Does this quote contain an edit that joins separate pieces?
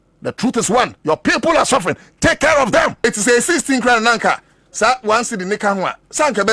yes; 1 cut; at 3.0 s

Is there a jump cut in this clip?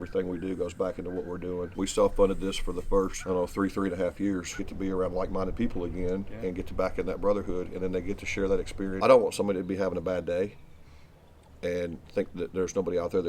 yes; 4 cuts; at 1.7 s, 3.2 s, 4.6 s, 9.0 s

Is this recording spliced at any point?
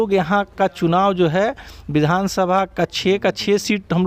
no; 0 cuts

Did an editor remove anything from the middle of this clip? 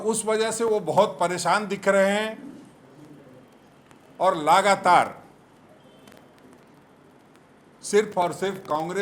no; 0 cuts

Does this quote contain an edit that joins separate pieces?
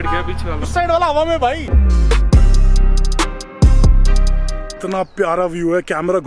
yes; 2 cuts; at 1.7 s, 4.8 s

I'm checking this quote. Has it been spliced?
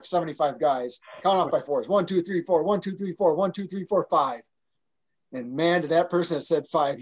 no; 0 cuts

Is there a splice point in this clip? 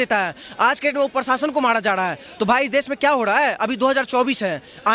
no; 0 cuts

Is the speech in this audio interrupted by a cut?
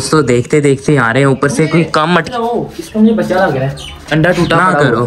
no; 0 cuts

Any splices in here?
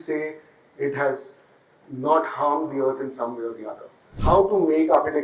yes; 1 cut; at 4.1 s

